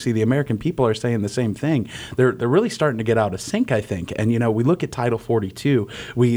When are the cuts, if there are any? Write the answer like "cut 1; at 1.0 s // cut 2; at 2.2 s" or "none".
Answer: none